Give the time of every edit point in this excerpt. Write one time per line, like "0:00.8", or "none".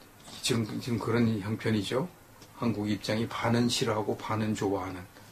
0:03.0